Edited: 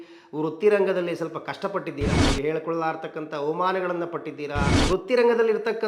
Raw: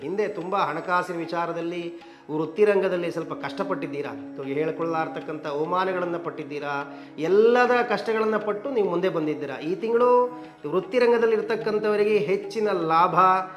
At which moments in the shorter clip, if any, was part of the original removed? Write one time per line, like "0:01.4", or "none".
0:02.2
0:04.7